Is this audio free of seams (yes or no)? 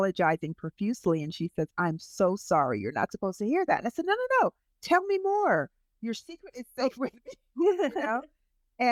yes